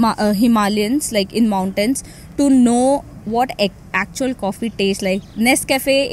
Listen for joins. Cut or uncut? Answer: uncut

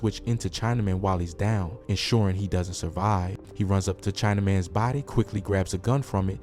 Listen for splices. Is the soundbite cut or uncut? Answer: cut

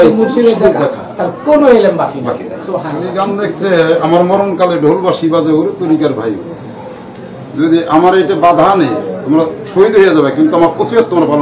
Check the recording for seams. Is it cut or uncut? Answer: cut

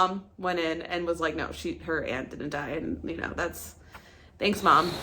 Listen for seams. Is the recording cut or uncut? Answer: uncut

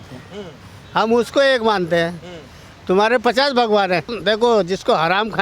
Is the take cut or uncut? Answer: cut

